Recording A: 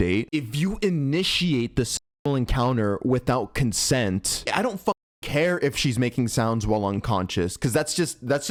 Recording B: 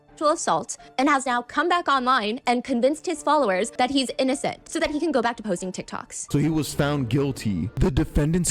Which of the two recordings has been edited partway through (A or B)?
B